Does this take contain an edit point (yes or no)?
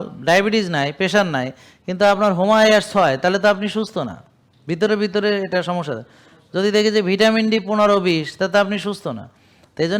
no